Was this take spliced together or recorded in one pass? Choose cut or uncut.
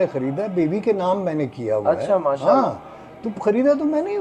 uncut